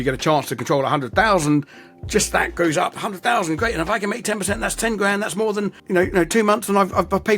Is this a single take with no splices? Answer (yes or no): no